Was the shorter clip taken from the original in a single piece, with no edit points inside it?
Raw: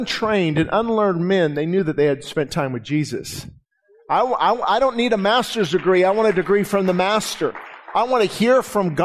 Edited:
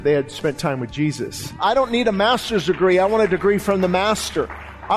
no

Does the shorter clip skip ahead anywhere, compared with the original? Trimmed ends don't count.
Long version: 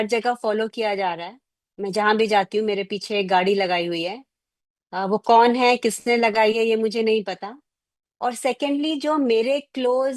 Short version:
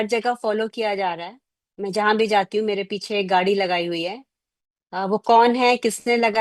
no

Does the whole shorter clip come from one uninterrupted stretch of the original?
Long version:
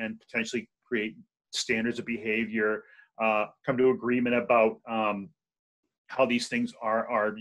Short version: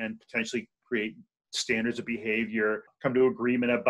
no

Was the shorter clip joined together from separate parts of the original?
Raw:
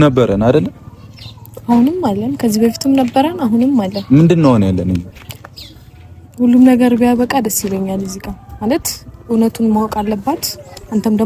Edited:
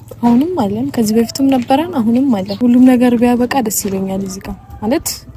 yes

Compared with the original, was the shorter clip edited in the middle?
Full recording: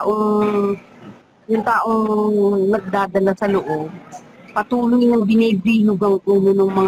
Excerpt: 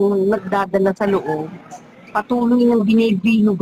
no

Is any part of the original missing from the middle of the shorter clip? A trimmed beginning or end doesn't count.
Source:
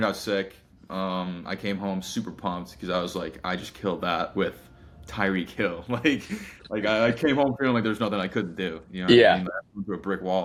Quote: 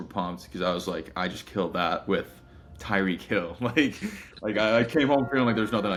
no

